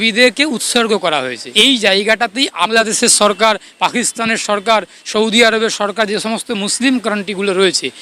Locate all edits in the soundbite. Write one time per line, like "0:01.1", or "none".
0:01.4
0:02.7